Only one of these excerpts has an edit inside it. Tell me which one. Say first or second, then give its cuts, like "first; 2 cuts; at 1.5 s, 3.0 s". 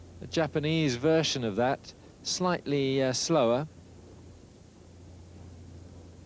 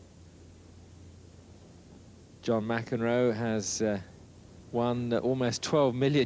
first; 1 cut; at 3.4 s